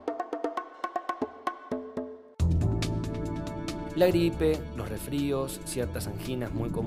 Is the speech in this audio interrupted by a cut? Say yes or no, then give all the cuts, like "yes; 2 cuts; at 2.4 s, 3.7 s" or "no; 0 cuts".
yes; 1 cut; at 3.5 s